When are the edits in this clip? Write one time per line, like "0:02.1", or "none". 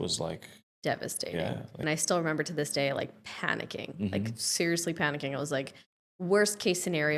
0:01.7

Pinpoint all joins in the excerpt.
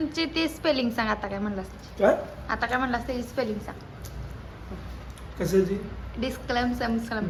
none

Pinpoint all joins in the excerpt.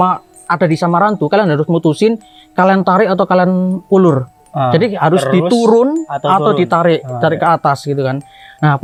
none

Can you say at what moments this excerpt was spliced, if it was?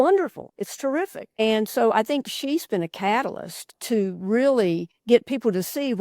0:00.9
0:03.8
0:04.9

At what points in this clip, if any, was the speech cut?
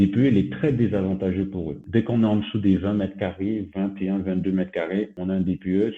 0:01.8
0:05.1

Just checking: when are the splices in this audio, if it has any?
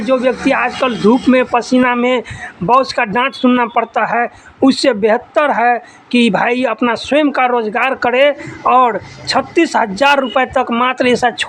none

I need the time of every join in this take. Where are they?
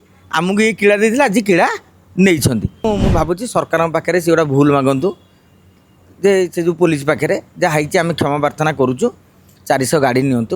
0:02.8

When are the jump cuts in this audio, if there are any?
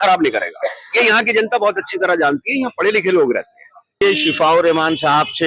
0:04.0

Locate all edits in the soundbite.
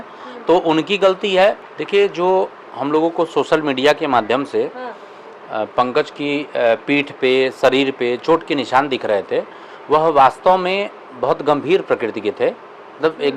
0:01.7

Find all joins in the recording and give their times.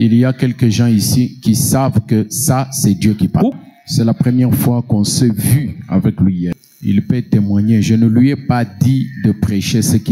0:03.5
0:06.5

